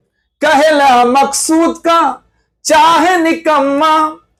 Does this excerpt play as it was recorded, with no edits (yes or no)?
yes